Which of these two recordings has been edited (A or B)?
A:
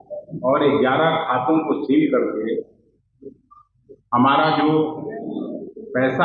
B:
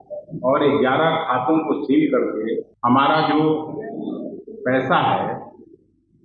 B